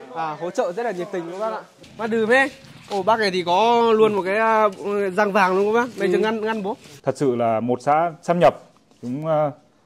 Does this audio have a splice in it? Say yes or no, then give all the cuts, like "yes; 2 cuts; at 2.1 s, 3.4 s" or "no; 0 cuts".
yes; 2 cuts; at 1.8 s, 6.8 s